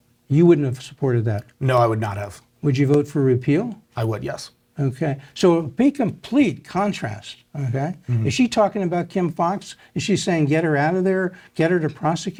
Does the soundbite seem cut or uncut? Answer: uncut